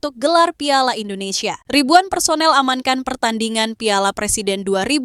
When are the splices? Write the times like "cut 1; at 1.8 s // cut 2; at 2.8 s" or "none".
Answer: cut 1; at 1.5 s